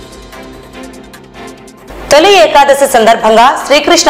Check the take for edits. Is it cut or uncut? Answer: cut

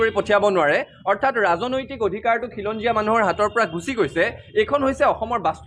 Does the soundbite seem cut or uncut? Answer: uncut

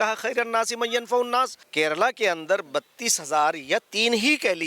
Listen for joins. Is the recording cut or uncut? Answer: cut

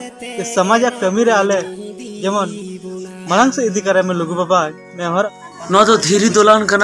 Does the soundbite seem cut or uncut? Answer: cut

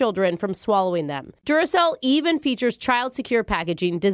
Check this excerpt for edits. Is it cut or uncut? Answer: uncut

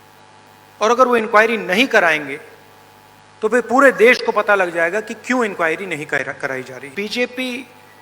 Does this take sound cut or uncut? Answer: cut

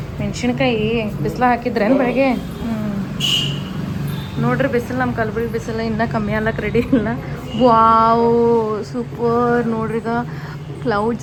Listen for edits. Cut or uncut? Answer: uncut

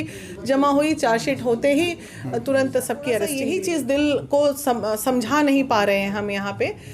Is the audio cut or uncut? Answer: cut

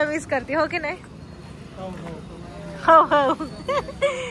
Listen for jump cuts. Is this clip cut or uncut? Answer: uncut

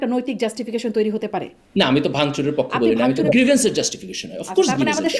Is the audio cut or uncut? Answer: cut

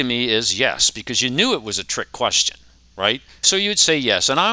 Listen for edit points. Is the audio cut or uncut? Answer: cut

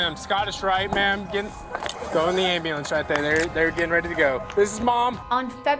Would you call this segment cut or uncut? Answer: uncut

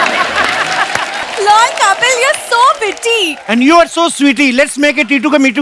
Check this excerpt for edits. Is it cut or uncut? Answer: cut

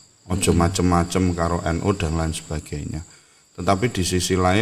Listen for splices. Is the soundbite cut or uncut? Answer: uncut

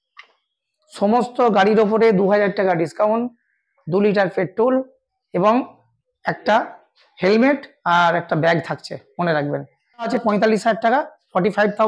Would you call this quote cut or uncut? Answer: cut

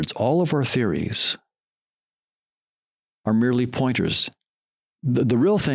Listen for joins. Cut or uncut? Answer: uncut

